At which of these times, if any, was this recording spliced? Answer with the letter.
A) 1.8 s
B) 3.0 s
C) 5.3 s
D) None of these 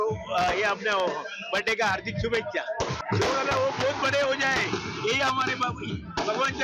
B